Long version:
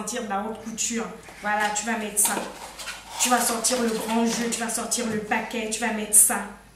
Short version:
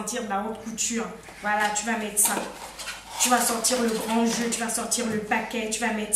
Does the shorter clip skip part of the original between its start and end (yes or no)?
no